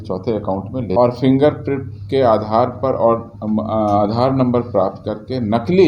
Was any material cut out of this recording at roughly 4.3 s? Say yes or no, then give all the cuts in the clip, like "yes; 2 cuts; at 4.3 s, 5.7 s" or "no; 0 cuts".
no; 1 cut; at 0.9 s